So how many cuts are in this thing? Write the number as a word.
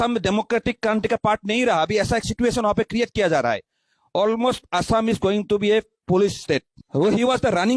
one